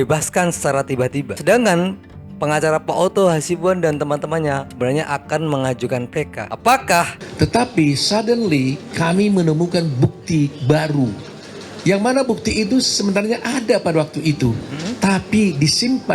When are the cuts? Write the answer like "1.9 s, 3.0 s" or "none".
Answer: 7.2 s